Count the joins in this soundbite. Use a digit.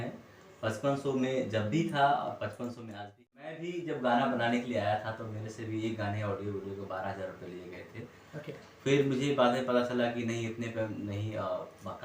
1